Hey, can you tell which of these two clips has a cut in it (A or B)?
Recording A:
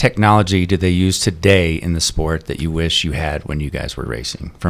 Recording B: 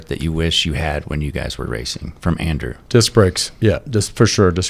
B